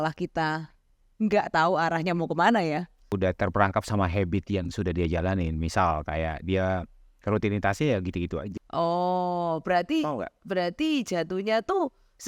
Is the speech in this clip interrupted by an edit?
yes; 2 cuts; at 3.1 s, 8.4 s

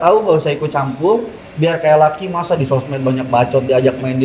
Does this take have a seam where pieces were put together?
yes; 1 cut; at 1.4 s

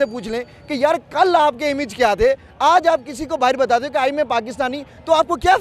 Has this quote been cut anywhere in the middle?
no; 0 cuts

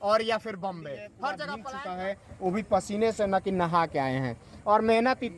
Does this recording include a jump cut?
yes; 1 cut; at 1.6 s

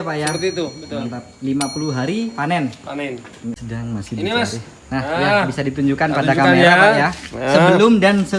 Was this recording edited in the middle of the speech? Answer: yes; 1 cut; at 3.5 s

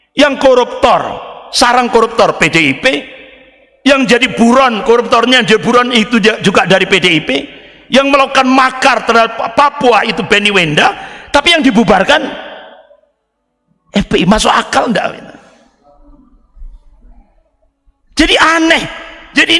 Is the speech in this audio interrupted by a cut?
no; 0 cuts

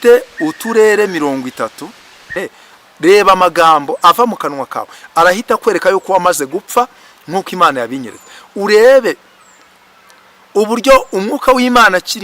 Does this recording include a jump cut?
yes; 1 cut; at 2.3 s

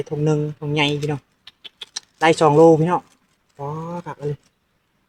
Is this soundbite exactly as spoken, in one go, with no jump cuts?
yes; 0 cuts

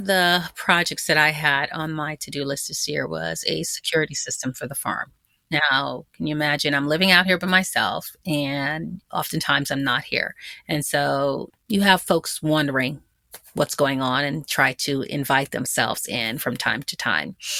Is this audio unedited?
yes; 0 cuts

